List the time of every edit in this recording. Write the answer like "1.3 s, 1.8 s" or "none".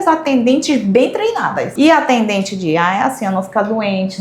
1.6 s